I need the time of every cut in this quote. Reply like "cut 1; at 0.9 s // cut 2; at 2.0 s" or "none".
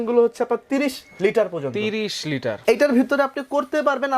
cut 1; at 2.5 s